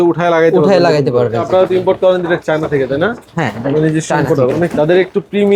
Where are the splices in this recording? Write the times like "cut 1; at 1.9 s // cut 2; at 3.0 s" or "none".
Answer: cut 1; at 1.4 s // cut 2; at 4.7 s